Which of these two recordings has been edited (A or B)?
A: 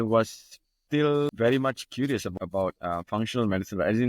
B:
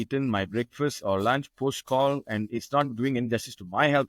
A